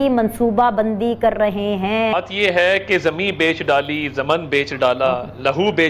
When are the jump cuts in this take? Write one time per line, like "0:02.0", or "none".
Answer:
0:02.1